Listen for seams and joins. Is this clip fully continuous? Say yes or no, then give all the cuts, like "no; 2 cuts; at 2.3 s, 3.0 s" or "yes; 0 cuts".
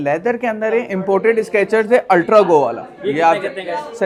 yes; 0 cuts